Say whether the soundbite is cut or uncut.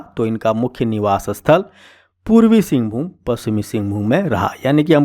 uncut